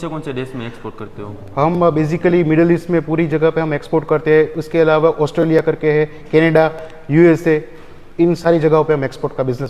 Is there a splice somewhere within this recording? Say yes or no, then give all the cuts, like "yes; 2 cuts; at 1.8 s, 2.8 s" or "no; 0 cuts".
yes; 1 cut; at 8.4 s